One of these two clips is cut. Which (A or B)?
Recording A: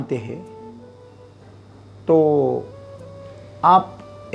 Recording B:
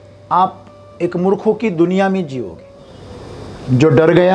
B